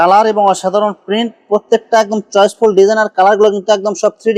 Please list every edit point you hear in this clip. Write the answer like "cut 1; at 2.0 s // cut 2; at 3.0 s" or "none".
none